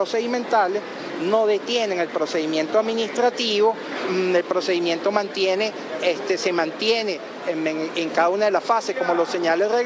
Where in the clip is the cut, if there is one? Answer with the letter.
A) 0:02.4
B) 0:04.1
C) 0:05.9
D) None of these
B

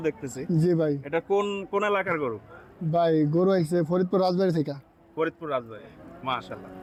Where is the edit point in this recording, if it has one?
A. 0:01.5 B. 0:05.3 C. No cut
C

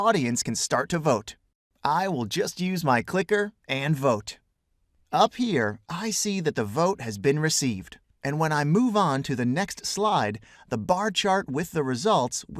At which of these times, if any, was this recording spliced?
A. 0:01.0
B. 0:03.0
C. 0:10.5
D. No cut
D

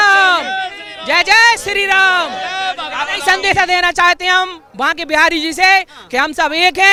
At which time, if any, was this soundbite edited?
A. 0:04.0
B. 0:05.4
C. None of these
C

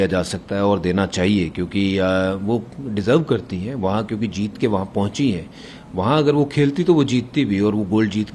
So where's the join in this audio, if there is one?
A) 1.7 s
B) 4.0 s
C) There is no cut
C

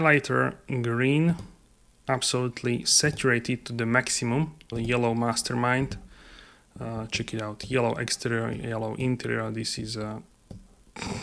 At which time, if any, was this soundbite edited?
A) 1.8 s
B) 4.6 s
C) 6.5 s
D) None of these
B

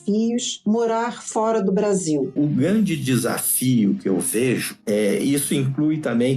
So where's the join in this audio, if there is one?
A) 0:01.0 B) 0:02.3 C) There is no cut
B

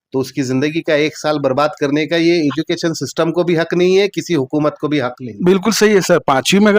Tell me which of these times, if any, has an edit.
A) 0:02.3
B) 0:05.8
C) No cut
C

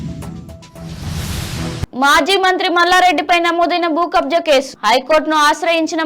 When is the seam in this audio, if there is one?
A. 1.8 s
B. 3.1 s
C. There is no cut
A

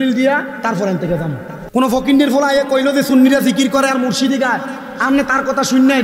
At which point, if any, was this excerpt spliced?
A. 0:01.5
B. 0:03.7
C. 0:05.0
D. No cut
A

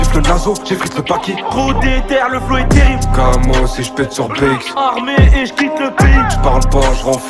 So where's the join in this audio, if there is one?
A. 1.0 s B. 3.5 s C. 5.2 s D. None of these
D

